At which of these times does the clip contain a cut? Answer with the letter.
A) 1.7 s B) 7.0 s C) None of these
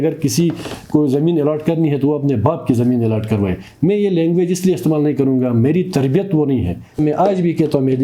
B